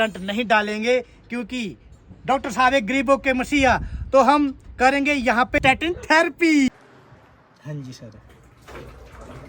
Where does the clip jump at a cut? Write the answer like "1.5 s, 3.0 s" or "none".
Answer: 6.7 s

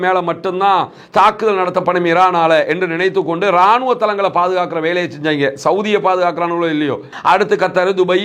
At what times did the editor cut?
7.1 s

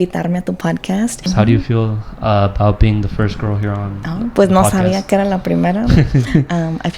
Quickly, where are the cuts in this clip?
1.3 s

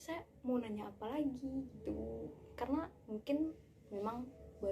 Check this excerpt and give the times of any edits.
none

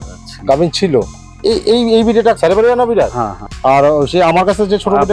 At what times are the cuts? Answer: 1.2 s, 2.4 s, 3.4 s

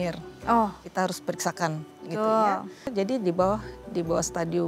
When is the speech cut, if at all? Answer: 2.9 s

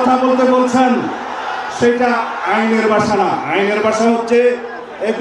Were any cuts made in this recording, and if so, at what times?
none

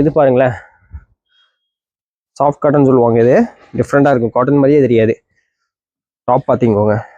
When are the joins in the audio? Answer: none

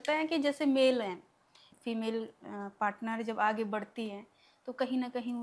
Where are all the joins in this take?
1.7 s

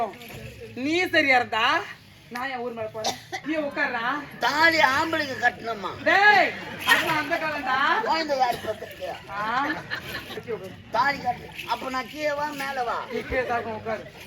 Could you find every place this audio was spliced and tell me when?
3.3 s, 10.4 s

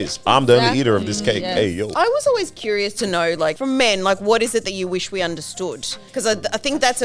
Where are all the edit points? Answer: 1.9 s, 3.6 s, 5.9 s

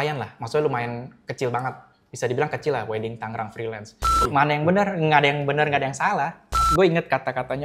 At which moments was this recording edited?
4.2 s, 6.6 s

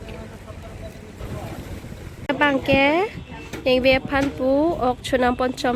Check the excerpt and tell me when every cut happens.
2.2 s

